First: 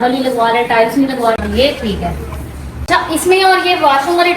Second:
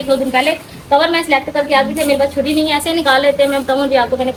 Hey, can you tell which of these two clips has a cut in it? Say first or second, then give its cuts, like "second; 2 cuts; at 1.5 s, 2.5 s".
first; 2 cuts; at 1.4 s, 2.7 s